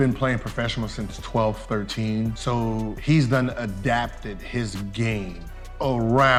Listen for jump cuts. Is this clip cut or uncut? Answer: uncut